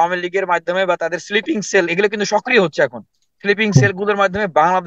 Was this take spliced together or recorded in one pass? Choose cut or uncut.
uncut